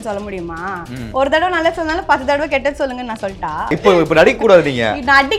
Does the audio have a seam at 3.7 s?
yes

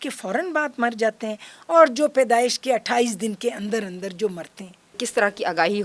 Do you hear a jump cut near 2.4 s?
no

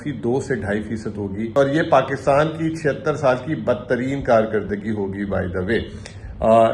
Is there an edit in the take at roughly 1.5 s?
yes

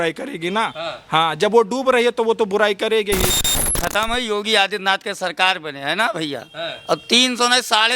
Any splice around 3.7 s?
yes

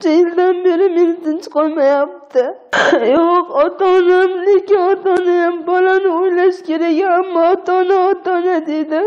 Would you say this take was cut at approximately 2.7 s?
yes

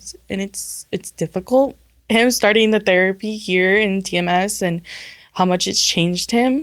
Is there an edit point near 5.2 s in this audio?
no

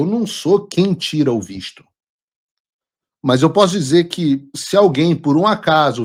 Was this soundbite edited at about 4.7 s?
no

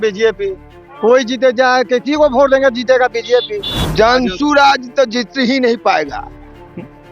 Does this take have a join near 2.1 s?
no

